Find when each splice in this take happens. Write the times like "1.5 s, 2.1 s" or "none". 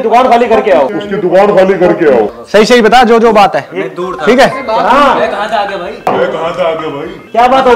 2.3 s